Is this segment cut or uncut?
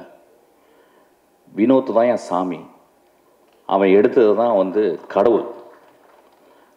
uncut